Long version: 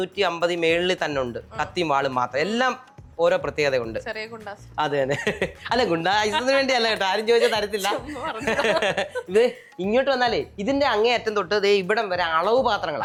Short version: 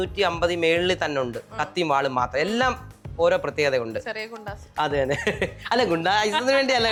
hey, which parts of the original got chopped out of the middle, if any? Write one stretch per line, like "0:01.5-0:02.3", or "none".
none